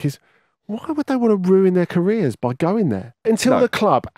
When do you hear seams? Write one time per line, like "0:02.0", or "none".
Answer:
0:03.2